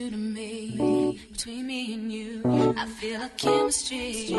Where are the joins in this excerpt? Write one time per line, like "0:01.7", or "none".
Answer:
0:03.3